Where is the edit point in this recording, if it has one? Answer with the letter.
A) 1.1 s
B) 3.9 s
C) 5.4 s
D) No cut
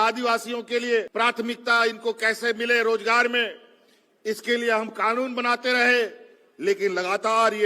A